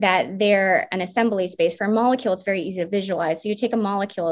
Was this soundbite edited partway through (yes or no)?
no